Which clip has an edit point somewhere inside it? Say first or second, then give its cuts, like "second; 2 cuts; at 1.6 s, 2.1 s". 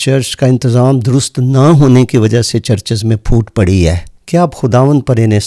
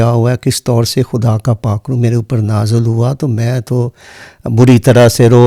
first; 1 cut; at 4.1 s